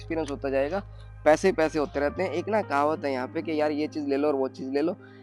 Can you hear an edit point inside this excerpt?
no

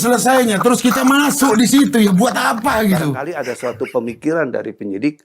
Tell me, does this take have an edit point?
yes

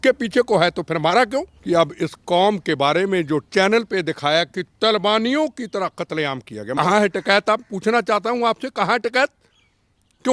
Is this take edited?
yes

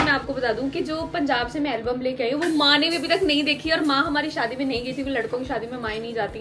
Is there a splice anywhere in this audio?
no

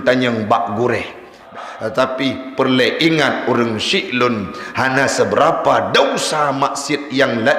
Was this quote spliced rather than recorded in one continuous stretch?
yes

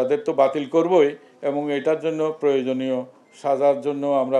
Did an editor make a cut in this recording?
no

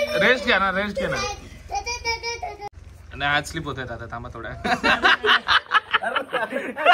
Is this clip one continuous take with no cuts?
no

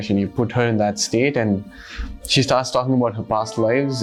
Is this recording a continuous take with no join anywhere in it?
yes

